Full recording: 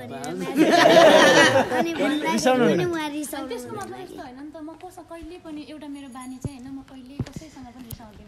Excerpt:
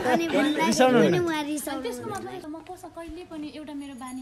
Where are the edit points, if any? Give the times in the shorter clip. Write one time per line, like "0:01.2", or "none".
0:02.4

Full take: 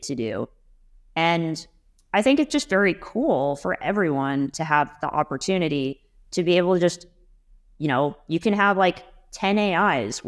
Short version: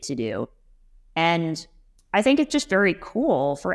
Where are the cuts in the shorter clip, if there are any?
none

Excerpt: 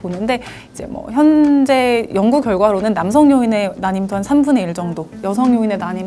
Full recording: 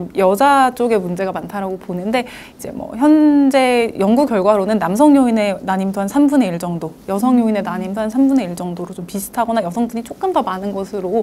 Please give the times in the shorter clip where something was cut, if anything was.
none

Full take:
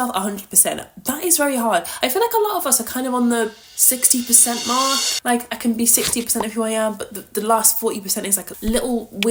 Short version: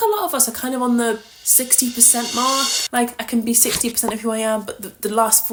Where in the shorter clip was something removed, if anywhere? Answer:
none

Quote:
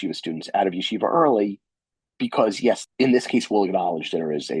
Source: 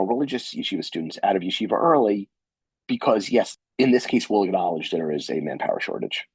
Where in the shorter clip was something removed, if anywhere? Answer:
0:02.9

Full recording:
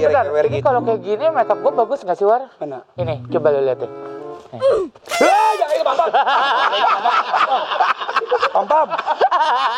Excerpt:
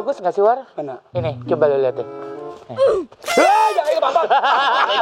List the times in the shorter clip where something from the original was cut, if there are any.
none

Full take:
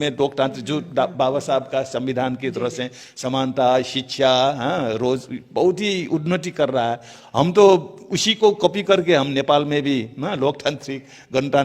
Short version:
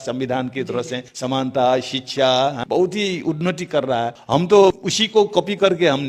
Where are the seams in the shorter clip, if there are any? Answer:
0:01.1
0:02.6
0:04.2
0:04.9

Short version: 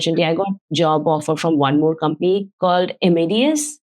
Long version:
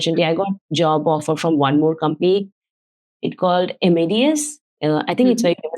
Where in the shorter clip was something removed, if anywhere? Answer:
0:02.5

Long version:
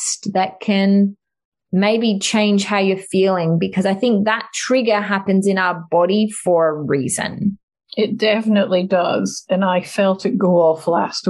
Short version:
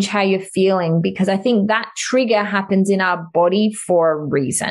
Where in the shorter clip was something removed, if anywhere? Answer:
none

